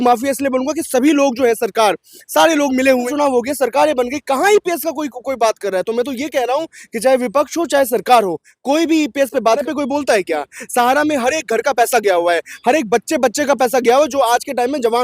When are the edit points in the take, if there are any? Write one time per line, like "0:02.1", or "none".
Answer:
0:03.1
0:09.6